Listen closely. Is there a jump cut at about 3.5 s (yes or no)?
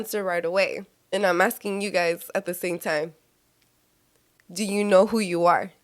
no